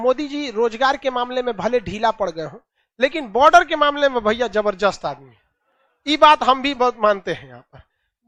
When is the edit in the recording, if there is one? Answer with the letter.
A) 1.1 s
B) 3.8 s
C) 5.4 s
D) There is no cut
D